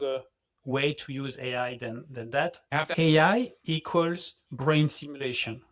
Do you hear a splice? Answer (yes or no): yes